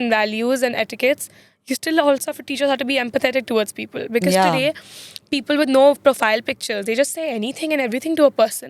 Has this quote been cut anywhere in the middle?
no; 0 cuts

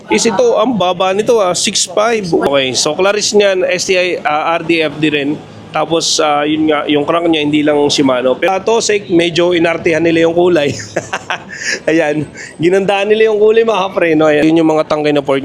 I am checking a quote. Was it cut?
yes; 3 cuts; at 2.5 s, 8.5 s, 14.4 s

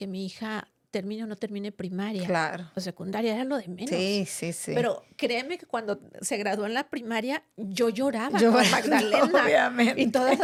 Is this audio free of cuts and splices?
yes; 0 cuts

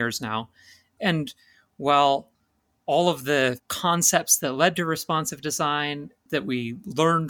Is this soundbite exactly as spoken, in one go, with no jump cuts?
no; 3 cuts; at 0.9 s, 3.7 s, 6.3 s

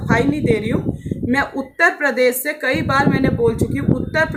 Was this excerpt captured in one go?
yes; 0 cuts

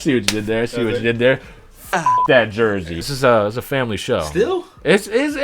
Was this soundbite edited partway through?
yes; 1 cut; at 3.1 s

